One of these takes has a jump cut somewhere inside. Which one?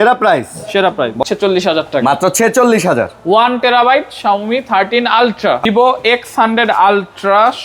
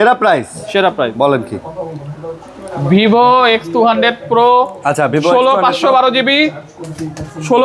first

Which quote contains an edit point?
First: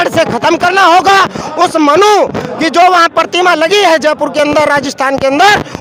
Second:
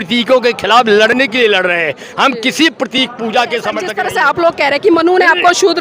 second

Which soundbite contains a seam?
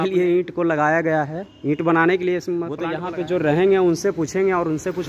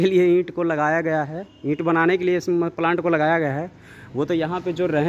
first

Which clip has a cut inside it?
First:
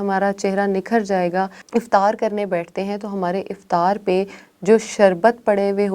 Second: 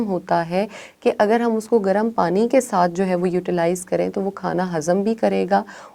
first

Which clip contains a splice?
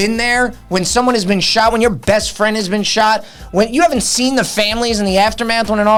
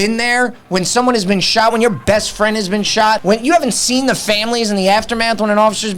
second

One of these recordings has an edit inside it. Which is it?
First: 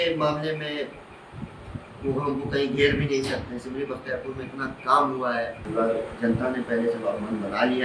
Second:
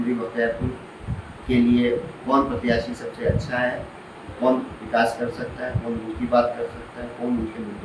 first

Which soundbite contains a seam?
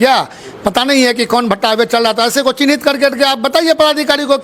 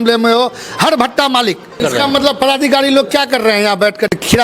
second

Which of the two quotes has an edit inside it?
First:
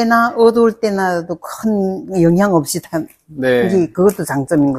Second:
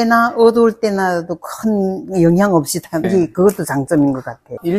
second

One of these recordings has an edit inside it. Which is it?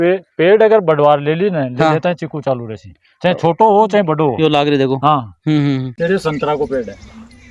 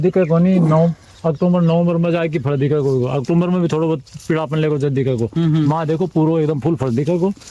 first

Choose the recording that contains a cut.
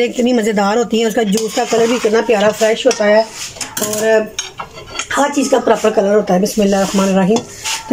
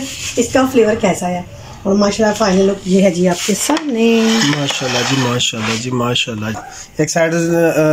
second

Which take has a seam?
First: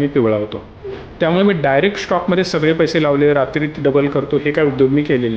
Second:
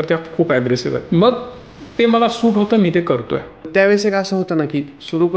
second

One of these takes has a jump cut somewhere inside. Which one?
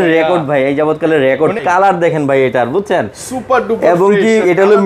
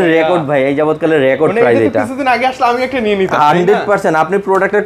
first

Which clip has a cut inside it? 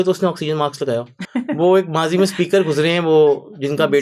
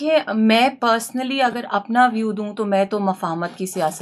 first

